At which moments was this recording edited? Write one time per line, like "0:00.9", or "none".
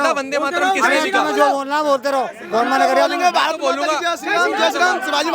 none